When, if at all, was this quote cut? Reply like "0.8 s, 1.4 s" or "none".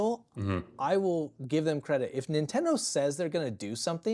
none